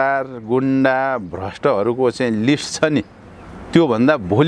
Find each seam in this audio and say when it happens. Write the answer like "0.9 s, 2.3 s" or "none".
none